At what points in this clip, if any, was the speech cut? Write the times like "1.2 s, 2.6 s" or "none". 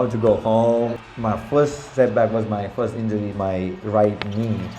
0.9 s, 3.3 s